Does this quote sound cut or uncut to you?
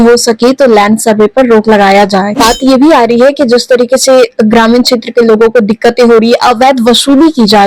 cut